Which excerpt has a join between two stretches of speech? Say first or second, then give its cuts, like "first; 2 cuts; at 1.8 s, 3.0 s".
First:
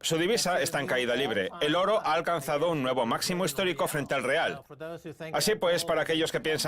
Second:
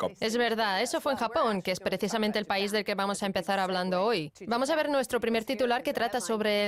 first; 1 cut; at 3.8 s